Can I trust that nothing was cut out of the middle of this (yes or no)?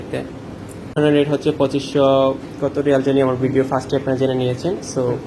no